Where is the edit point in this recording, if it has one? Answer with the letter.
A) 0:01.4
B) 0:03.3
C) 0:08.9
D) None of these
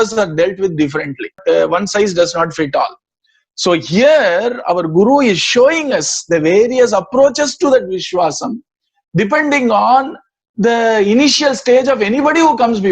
A